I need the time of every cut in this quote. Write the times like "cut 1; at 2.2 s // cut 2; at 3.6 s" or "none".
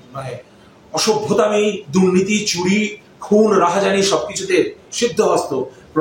none